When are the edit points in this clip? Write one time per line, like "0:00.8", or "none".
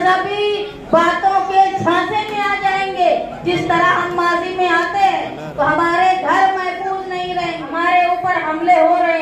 0:07.6